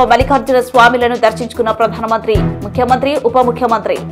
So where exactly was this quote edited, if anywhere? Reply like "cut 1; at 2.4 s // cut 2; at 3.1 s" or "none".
none